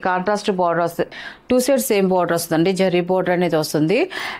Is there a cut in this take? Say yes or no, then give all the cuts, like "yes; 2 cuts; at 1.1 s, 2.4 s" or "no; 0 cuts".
yes; 1 cut; at 1.1 s